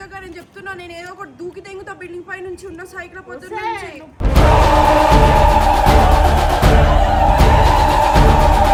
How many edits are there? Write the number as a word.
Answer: zero